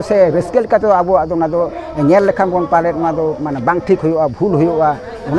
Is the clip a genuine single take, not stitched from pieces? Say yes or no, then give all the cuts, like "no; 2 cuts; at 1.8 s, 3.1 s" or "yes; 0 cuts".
yes; 0 cuts